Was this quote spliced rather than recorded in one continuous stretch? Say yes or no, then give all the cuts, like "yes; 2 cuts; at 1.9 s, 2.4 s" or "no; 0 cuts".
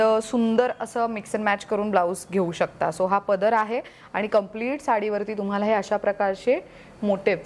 no; 0 cuts